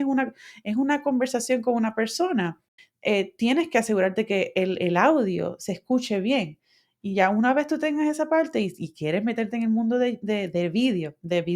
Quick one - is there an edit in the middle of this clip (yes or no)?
yes